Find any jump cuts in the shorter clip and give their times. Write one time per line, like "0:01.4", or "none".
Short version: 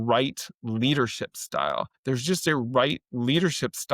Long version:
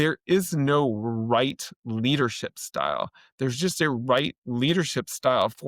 0:01.9